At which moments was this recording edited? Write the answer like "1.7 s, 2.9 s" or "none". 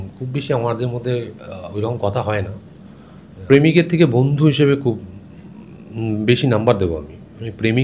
3.4 s